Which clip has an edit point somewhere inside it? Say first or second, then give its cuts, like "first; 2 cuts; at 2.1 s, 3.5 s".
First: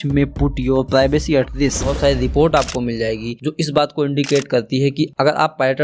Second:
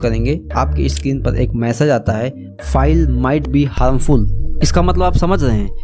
first; 1 cut; at 1.9 s